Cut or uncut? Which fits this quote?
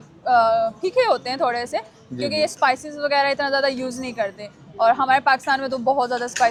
uncut